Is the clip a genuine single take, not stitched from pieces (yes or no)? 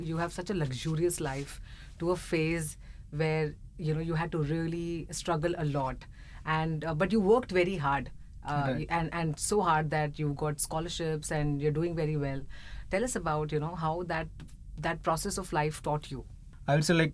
yes